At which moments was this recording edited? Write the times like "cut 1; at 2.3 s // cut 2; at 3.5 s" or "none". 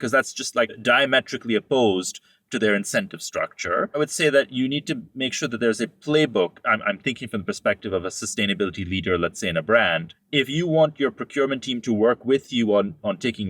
cut 1; at 0.8 s // cut 2; at 4.0 s // cut 3; at 10.1 s

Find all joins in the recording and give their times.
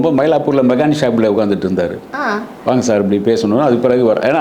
none

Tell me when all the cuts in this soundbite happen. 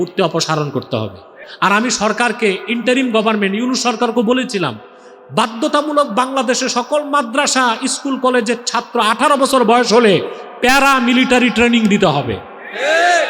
cut 1; at 1.4 s

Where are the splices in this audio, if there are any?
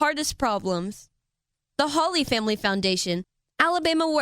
cut 1; at 3.2 s

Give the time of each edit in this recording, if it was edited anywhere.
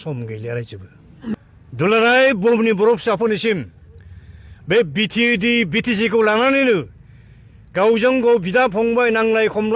cut 1; at 1.4 s

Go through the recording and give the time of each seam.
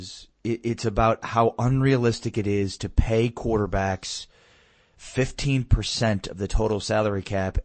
none

